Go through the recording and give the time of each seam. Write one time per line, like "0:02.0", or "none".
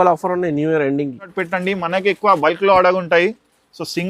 0:01.3